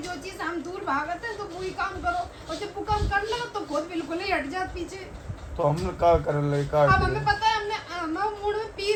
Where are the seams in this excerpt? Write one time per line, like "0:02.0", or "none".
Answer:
none